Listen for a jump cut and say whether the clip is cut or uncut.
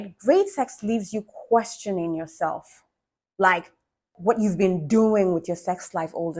cut